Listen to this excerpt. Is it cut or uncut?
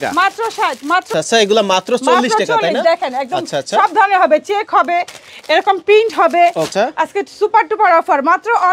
cut